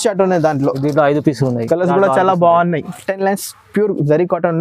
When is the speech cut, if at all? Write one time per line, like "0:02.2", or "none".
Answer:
0:02.9